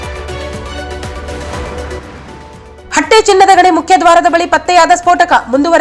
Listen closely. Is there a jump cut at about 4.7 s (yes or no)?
no